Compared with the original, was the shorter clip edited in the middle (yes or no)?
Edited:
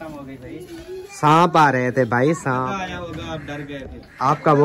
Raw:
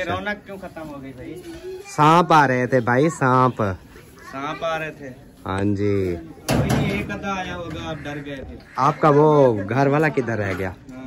yes